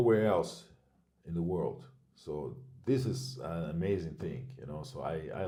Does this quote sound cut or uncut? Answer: uncut